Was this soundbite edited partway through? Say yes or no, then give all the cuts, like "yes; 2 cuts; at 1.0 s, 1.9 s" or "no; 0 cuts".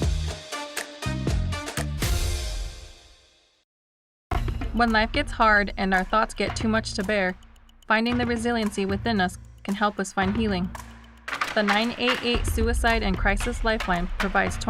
yes; 1 cut; at 3.6 s